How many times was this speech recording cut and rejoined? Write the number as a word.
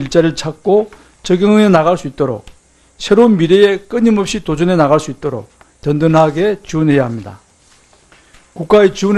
one